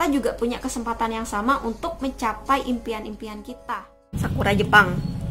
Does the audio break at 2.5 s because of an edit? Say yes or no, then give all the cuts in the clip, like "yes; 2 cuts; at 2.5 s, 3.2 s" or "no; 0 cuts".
no; 1 cut; at 4.1 s